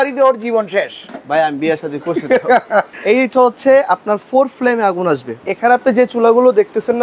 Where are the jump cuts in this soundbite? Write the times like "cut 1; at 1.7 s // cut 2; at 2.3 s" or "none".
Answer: cut 1; at 2.9 s // cut 2; at 5.5 s